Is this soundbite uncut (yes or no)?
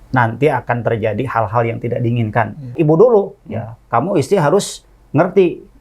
no